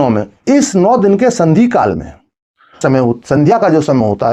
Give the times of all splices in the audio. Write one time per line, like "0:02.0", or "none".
0:02.8